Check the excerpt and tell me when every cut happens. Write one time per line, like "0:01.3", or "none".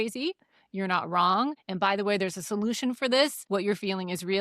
0:01.6
0:03.4